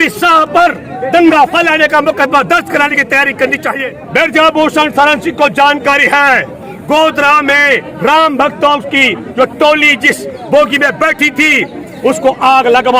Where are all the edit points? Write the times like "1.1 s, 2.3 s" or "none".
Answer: 3.8 s

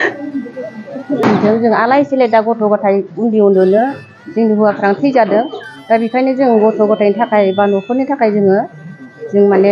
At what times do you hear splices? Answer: 1.2 s

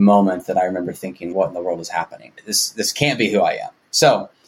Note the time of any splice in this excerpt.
none

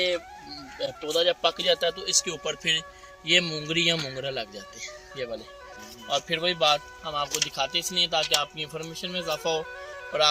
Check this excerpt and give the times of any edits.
5.7 s

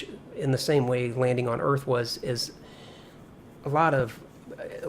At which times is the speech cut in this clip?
3.1 s

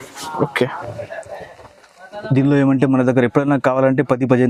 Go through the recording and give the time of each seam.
none

